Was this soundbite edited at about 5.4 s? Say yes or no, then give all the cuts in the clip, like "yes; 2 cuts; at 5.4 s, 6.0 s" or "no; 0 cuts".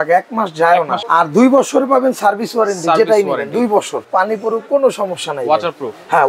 no; 2 cuts; at 1.0 s, 4.0 s